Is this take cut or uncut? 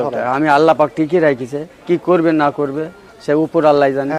uncut